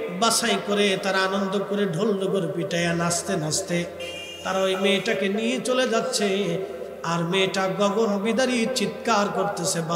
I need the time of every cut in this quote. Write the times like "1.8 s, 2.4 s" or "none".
none